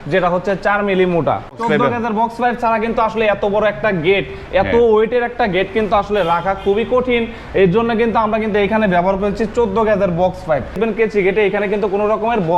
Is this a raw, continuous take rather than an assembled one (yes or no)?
no